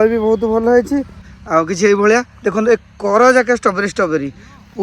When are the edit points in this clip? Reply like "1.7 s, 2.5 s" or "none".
1.2 s